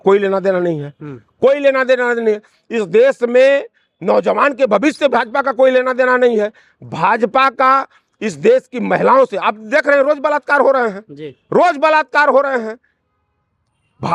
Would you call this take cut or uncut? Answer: uncut